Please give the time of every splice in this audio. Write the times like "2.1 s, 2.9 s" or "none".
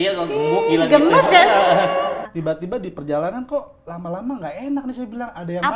2.3 s